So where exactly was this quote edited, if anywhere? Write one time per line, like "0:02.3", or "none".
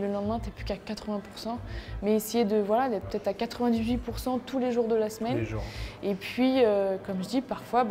none